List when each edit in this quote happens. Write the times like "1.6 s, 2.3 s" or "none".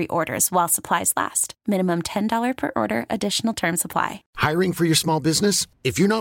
4.2 s